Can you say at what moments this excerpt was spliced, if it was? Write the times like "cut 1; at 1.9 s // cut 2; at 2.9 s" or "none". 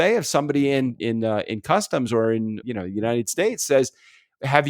cut 1; at 1.0 s // cut 2; at 2.6 s